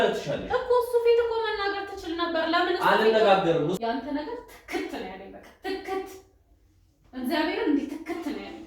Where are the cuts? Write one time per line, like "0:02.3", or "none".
0:03.8